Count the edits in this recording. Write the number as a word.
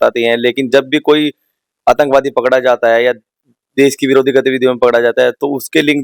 zero